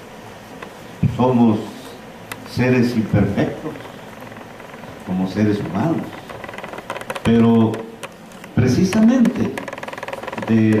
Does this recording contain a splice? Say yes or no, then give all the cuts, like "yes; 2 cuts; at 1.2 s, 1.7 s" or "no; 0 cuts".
no; 0 cuts